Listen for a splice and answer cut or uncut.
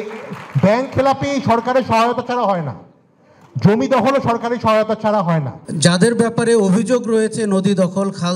cut